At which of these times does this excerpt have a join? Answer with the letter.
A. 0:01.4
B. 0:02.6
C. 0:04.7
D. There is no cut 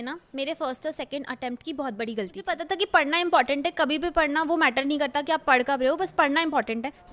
B